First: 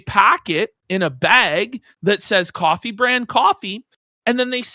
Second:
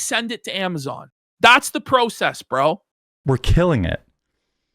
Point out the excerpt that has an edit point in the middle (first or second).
second